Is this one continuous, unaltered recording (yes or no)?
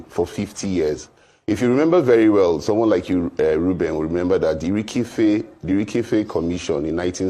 yes